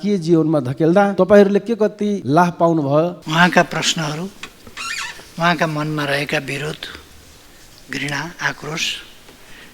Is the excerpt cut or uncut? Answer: cut